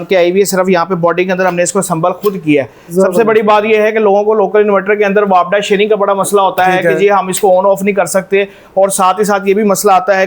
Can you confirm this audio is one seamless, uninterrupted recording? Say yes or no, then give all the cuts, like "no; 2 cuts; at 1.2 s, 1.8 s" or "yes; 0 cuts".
yes; 0 cuts